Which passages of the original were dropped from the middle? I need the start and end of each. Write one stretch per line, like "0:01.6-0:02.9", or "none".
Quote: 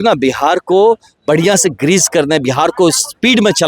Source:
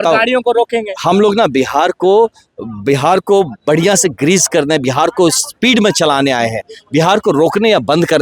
0:02.5-0:03.6

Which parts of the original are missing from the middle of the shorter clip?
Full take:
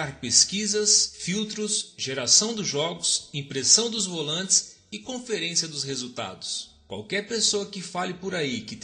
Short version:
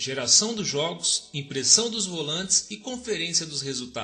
0:04.6-0:04.9

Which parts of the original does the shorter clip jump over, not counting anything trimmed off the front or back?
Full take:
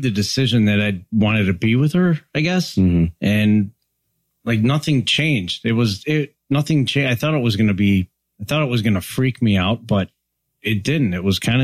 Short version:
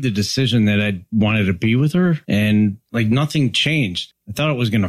0:02.2-0:03.1
0:03.8-0:04.4
0:05.5-0:08.1

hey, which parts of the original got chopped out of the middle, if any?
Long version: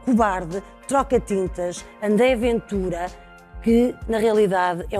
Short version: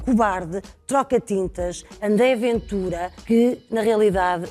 0:03.1-0:03.4

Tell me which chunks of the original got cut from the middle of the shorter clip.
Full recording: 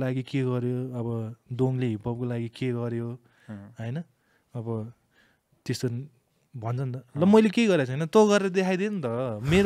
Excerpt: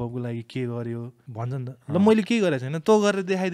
0:03.3-0:06.5

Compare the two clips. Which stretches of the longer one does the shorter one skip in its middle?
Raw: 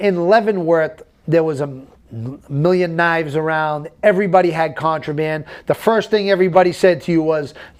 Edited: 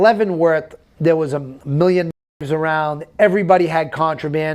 0:01.8-0:02.4

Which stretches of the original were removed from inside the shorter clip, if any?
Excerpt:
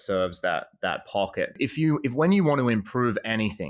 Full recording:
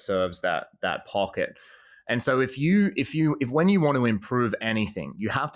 0:01.6-0:02.9

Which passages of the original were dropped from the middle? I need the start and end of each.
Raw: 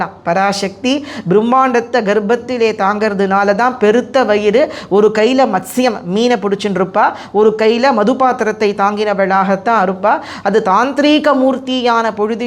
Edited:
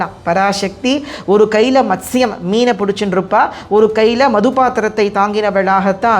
0:01.2-0:04.8

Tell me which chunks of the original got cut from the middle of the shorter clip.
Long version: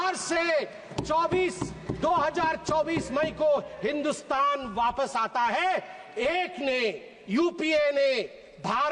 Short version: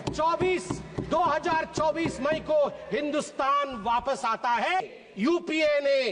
0:05.7-0:06.9

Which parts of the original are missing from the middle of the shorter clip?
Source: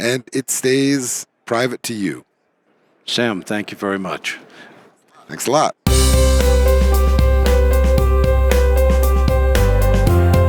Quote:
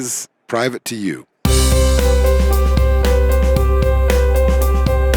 0:02.3-0:05.8

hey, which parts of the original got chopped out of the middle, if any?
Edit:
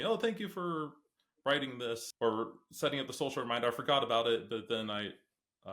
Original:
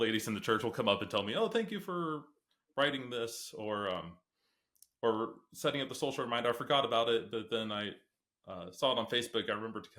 0:03.4-0:04.9

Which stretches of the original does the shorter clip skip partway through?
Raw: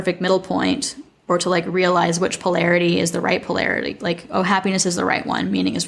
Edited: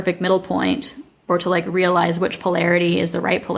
none

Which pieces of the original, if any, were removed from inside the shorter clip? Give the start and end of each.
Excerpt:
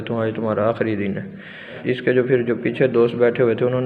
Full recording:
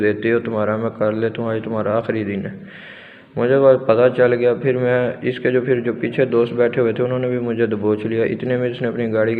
0:03.1-0:05.2

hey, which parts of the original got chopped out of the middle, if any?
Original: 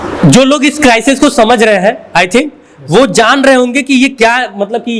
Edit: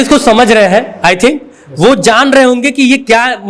none

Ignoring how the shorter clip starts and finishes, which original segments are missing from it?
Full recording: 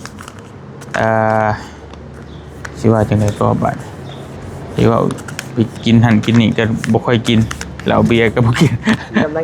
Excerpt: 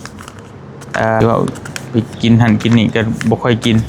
0:01.2-0:04.8

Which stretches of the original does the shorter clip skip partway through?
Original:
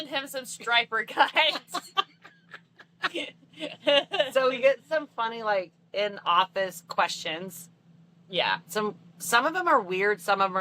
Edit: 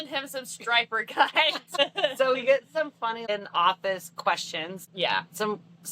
0:01.8-0:03.9
0:05.4-0:06.0
0:07.5-0:08.2

